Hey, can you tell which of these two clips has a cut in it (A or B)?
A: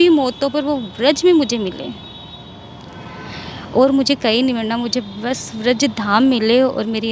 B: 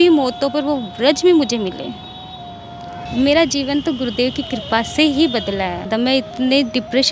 B